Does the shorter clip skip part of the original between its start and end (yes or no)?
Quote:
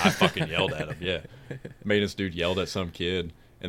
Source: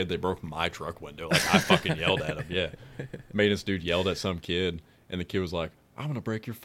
no